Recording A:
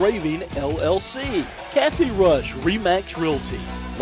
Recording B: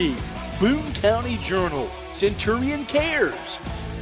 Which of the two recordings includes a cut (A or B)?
A